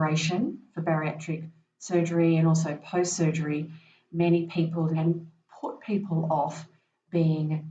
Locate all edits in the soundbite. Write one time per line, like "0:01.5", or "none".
0:04.9